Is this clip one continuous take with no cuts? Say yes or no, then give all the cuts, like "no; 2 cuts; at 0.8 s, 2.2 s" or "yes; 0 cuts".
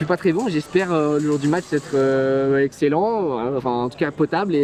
yes; 0 cuts